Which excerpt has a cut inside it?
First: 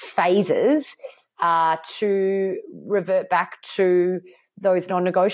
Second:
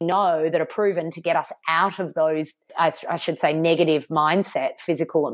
second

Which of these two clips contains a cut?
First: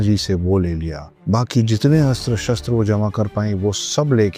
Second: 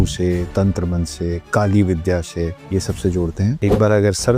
second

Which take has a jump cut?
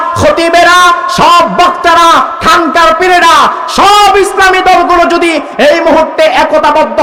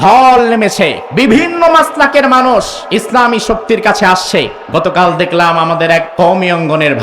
second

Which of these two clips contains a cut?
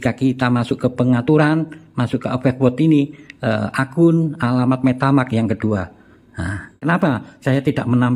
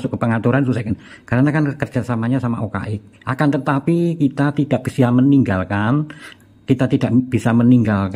first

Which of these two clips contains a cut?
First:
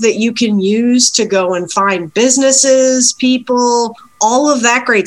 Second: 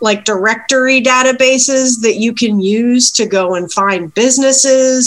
first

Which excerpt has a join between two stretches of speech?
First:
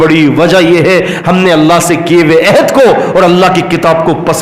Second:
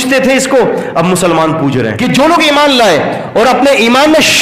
second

